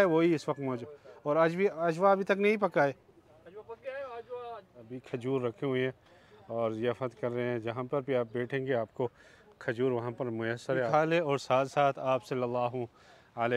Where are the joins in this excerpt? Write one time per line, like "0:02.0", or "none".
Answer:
0:05.0
0:10.9